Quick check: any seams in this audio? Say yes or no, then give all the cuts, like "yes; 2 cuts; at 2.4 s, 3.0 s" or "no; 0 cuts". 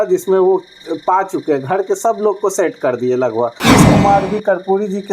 yes; 1 cut; at 3.6 s